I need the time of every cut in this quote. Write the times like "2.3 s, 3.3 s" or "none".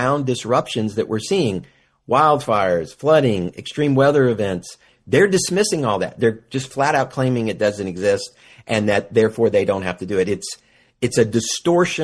4.9 s